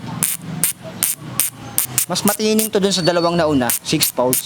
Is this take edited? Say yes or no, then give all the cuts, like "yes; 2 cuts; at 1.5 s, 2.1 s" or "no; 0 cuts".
yes; 1 cut; at 1.8 s